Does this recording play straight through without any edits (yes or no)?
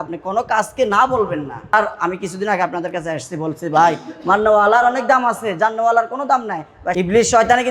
no